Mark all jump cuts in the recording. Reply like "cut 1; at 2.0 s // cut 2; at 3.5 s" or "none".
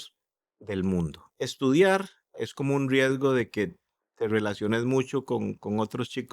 cut 1; at 1.2 s // cut 2; at 2.4 s